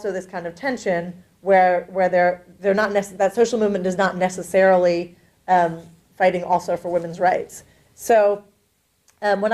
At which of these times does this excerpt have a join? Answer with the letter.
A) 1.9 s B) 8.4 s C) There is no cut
A